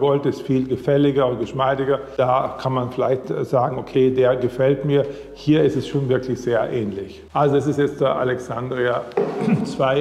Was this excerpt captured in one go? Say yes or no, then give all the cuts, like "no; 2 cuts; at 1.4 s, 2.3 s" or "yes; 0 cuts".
yes; 0 cuts